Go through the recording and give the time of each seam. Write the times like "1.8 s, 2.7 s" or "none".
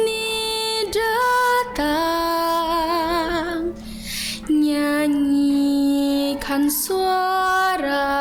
none